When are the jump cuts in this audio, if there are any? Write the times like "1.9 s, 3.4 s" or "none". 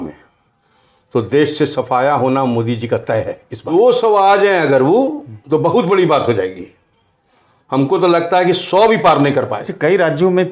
3.6 s, 9.6 s

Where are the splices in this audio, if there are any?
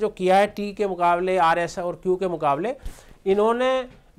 none

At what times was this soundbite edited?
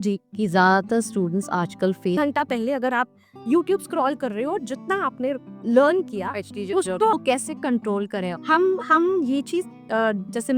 2.2 s, 7.1 s

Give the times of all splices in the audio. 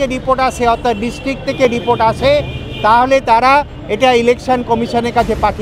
none

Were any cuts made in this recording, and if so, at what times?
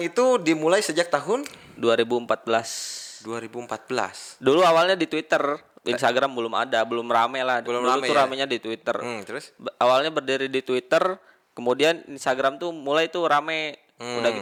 none

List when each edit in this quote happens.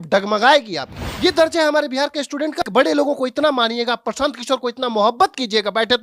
1.0 s, 2.6 s

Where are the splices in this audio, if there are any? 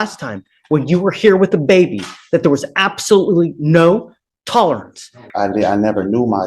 5.2 s

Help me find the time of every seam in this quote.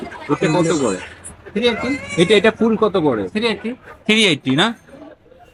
none

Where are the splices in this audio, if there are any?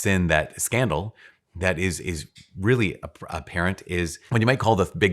4.2 s

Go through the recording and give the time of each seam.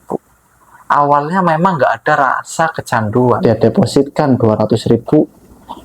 3.6 s

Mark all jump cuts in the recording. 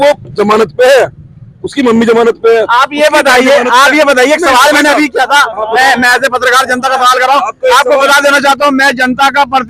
none

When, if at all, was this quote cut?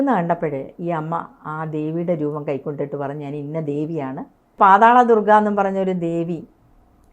4.6 s

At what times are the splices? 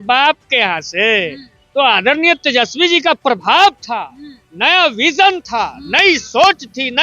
none

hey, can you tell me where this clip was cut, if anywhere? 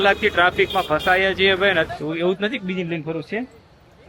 1.9 s

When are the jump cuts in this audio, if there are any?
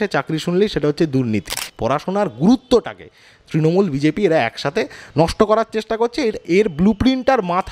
1.7 s

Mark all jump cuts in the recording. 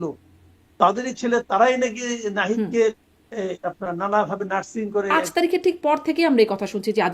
5.1 s

